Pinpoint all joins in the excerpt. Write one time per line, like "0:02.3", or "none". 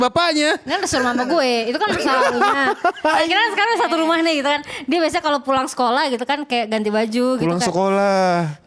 none